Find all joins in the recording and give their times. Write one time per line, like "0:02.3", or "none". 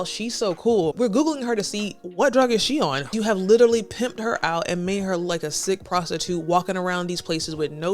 0:00.9
0:03.1